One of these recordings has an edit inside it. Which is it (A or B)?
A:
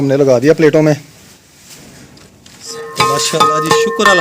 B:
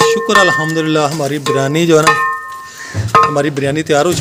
A